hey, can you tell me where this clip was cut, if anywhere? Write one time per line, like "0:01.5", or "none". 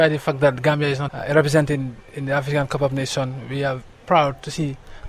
0:01.0